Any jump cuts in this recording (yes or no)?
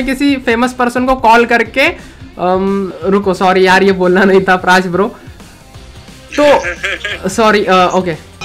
no